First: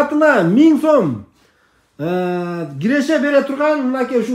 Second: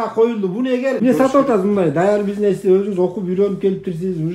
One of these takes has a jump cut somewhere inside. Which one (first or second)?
second